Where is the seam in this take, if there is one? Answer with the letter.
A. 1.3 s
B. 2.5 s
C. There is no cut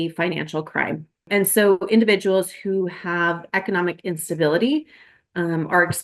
A